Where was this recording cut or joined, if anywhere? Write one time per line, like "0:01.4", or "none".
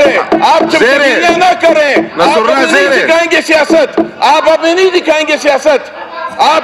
none